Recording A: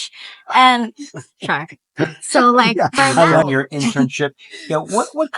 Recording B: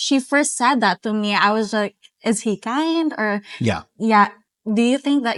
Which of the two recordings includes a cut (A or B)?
A